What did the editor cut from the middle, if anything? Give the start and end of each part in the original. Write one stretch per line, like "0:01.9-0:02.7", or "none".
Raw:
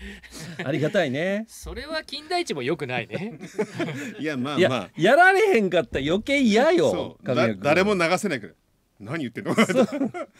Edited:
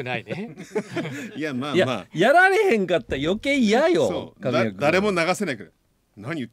none

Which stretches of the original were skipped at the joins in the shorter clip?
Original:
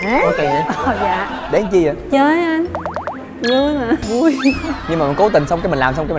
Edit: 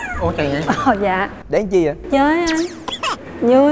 none

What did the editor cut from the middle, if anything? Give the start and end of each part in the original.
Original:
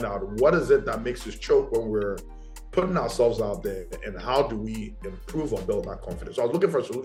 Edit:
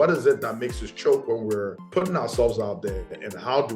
0:02.2-0:02.6

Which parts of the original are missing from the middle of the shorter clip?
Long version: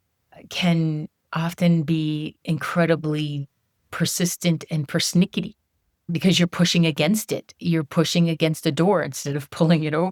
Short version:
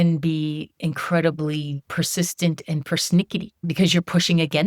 0:03.4-0:03.8
0:05.6-0:06.0

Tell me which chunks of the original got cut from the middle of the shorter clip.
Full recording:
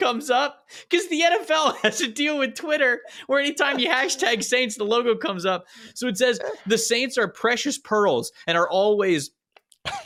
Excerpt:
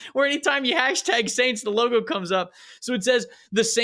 none

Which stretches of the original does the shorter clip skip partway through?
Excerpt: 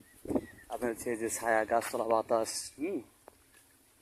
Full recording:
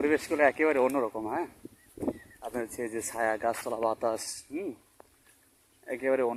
none

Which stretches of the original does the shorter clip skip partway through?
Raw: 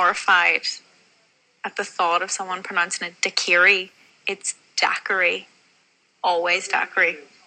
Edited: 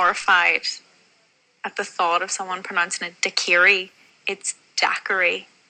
none

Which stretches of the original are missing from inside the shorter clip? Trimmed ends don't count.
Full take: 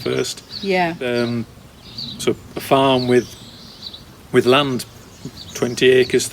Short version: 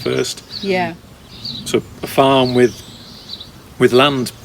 0:01.0-0:01.5

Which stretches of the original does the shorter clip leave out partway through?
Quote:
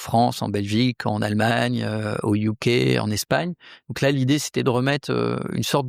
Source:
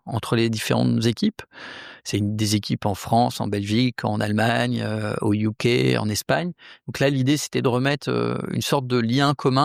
none

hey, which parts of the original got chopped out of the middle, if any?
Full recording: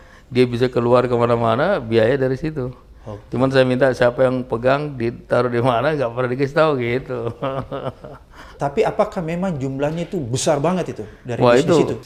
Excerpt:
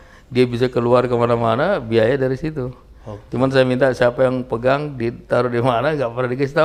none

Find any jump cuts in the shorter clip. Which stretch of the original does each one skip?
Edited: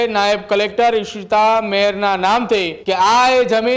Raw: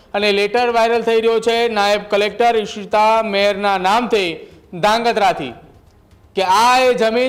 0:04.4-0:06.2

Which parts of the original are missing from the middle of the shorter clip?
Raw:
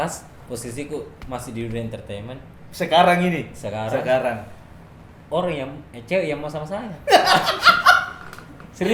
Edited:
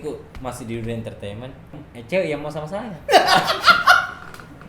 0:02.7-0:05.8

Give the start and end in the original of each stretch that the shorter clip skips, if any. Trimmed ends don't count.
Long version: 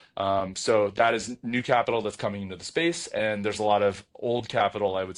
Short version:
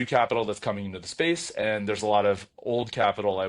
none

